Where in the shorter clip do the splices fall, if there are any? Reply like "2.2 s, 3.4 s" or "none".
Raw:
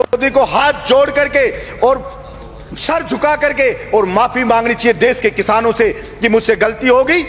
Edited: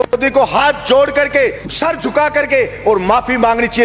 1.6 s